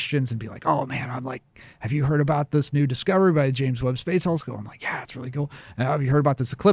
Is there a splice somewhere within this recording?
no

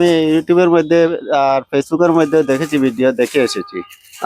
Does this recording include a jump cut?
no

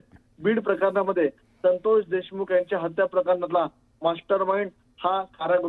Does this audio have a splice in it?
no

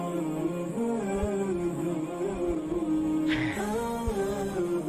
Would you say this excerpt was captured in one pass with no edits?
yes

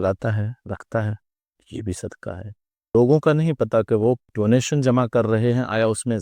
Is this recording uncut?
no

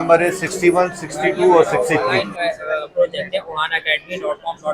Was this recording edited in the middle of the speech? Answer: yes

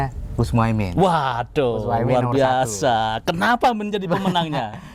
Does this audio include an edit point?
no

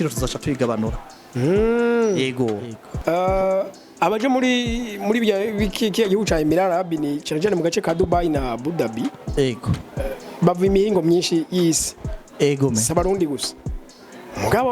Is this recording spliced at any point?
yes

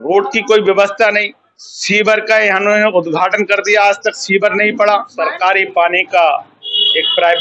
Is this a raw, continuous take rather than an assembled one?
no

